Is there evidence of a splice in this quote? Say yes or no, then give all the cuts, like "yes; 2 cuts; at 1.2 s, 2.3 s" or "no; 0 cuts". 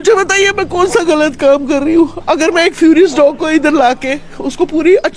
no; 0 cuts